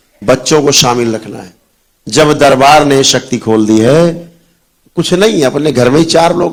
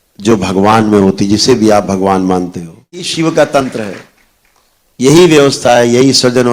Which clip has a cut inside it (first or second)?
second